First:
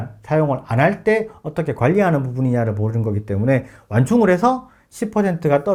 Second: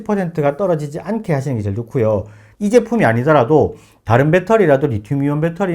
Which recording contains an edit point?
second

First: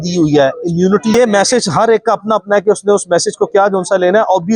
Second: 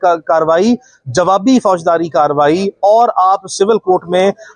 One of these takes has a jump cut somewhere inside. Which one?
first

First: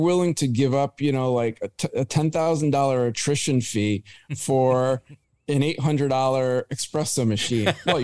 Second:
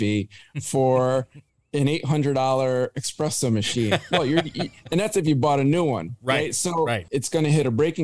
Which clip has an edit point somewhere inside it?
second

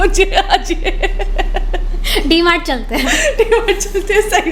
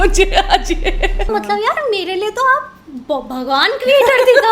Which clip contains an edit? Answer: second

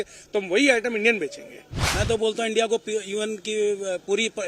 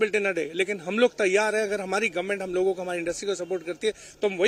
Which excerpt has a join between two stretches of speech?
first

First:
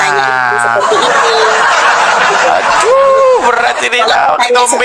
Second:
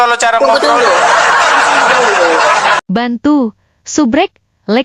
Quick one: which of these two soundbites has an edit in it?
second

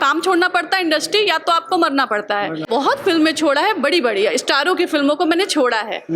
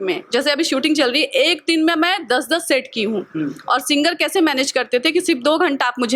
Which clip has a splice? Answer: first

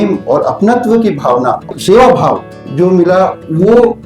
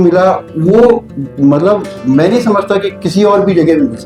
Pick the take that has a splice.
first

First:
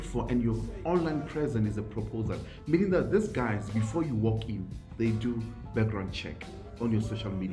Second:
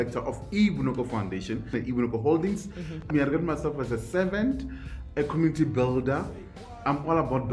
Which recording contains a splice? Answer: second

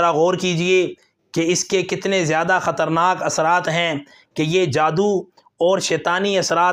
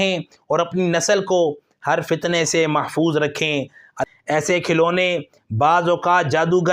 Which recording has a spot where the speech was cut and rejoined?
second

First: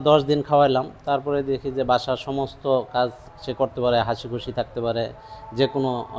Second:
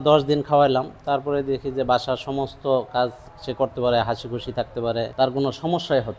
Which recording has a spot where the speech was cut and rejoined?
second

